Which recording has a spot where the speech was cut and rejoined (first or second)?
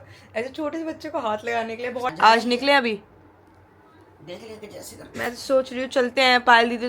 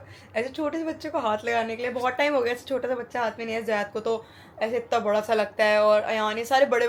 first